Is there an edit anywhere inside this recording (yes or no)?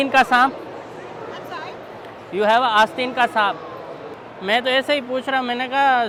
no